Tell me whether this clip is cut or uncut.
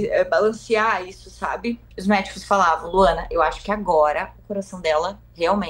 cut